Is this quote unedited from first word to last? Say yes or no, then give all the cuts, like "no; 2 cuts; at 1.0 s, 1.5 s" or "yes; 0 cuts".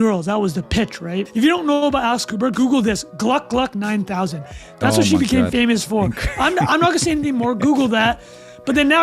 no; 1 cut; at 1.3 s